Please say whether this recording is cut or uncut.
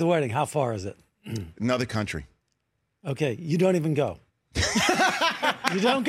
uncut